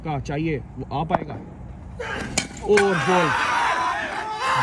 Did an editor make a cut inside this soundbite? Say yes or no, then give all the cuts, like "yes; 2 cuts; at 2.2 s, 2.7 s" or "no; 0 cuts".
no; 0 cuts